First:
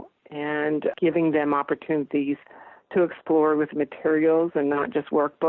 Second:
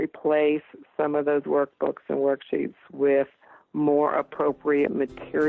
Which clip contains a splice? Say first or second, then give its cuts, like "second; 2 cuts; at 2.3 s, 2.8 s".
first; 1 cut; at 1.0 s